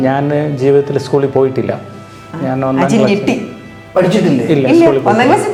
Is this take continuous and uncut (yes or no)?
yes